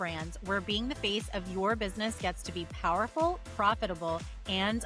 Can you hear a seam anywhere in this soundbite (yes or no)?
no